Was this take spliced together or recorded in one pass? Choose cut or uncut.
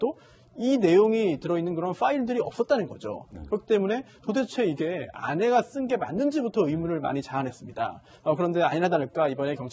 cut